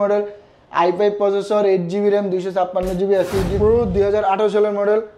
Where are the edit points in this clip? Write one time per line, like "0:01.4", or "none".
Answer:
0:03.5